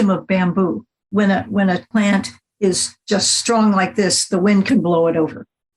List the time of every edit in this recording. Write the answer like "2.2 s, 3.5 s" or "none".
1.1 s, 1.9 s, 2.9 s